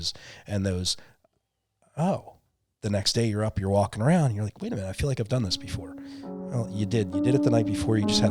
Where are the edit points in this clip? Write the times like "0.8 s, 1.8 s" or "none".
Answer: none